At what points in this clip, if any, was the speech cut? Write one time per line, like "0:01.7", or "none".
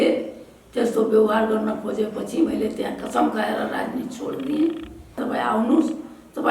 0:05.2